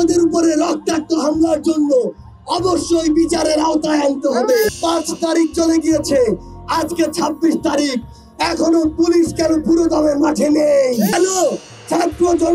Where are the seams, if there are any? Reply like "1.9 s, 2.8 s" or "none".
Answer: 4.7 s, 11.1 s